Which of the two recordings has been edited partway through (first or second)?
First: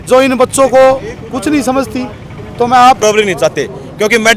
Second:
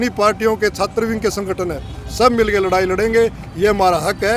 first